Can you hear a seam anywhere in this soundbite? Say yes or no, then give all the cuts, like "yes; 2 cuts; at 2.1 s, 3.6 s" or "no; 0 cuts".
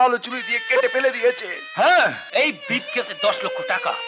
yes; 1 cut; at 2.2 s